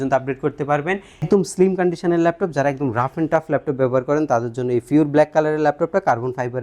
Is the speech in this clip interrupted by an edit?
yes; 1 cut; at 1.2 s

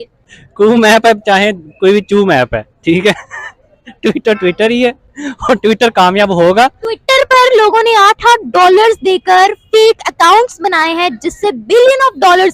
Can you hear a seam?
no; 0 cuts

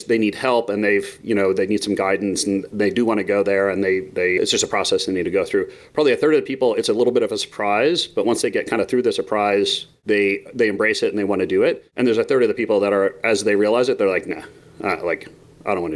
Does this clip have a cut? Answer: yes; 2 cuts; at 9.9 s, 11.9 s

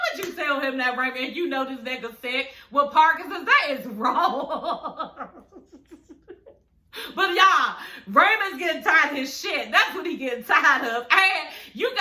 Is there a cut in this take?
no; 0 cuts

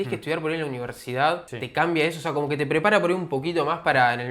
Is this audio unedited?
yes; 0 cuts

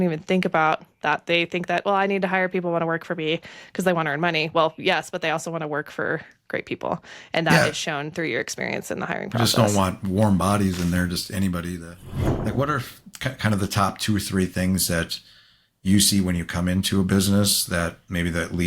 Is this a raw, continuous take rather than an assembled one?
no; 1 cut; at 12.0 s

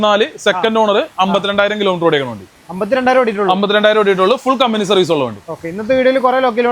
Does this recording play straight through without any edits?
yes; 0 cuts

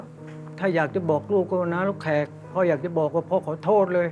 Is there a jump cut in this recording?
no; 0 cuts

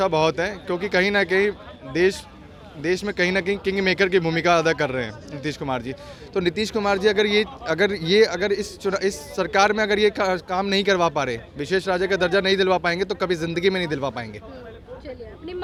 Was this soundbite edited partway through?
no; 0 cuts

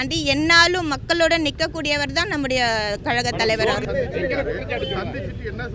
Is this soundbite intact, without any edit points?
no; 1 cut; at 3.8 s

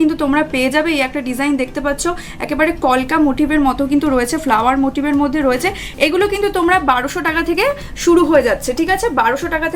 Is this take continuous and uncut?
yes; 0 cuts

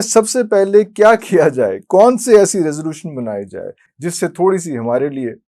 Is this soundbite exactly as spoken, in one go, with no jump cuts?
yes; 0 cuts

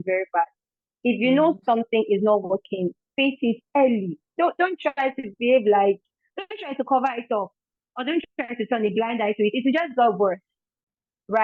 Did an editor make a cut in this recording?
no; 0 cuts

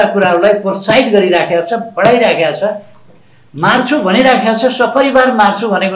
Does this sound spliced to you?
no; 0 cuts

